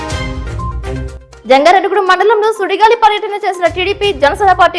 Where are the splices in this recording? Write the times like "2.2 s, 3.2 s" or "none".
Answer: 1.1 s